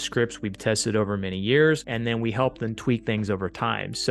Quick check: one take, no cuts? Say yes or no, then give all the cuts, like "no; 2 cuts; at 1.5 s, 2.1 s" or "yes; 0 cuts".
no; 1 cut; at 1.9 s